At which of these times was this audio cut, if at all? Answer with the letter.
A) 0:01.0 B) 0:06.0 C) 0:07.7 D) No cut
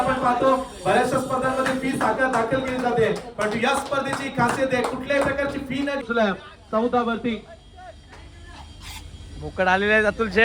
B